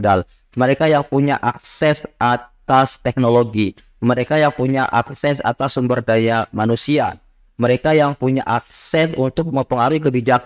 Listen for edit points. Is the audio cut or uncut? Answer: uncut